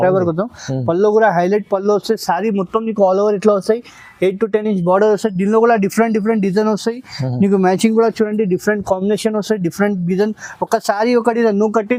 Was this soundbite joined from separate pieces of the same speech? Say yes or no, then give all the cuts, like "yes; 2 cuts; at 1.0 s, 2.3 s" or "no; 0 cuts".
no; 0 cuts